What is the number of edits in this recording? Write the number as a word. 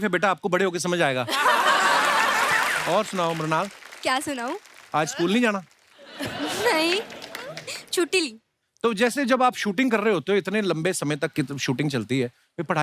one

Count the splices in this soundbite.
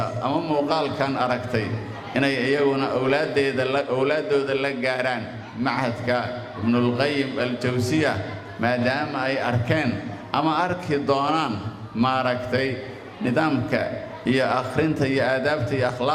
zero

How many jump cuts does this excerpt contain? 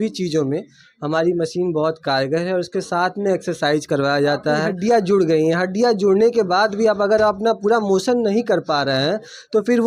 one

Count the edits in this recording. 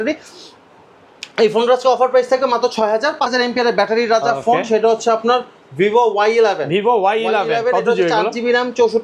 one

